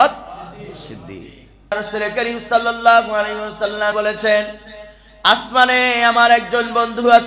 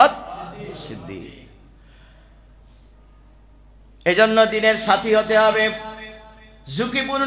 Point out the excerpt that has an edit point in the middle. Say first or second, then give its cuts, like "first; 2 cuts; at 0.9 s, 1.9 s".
first; 2 cuts; at 1.7 s, 3.9 s